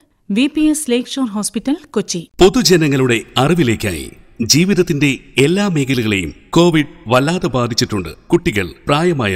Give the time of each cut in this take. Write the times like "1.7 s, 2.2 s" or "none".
2.2 s